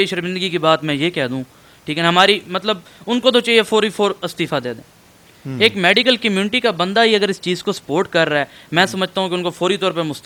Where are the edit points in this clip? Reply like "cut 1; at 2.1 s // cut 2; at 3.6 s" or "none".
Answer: none